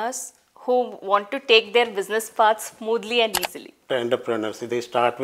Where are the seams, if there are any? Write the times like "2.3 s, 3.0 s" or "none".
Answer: 3.9 s